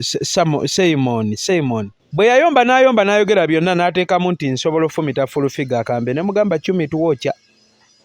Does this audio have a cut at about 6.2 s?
no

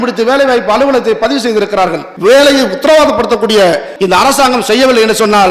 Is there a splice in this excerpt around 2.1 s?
yes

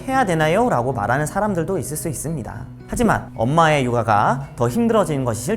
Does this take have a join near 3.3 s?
yes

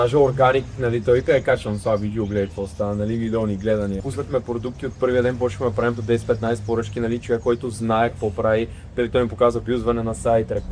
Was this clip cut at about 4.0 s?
yes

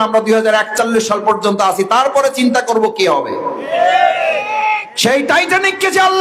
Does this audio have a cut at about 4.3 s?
no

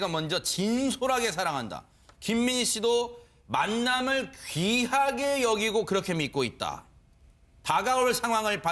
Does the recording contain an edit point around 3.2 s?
yes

